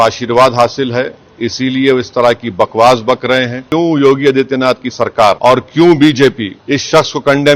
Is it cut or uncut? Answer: cut